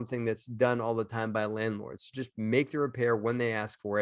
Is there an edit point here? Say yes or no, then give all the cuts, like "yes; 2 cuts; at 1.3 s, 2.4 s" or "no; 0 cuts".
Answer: no; 0 cuts